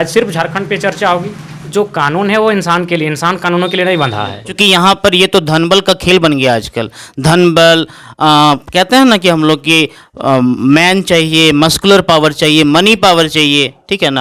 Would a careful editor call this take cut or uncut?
cut